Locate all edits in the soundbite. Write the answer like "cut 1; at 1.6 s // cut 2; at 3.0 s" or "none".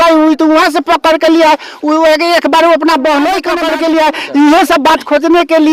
cut 1; at 3.6 s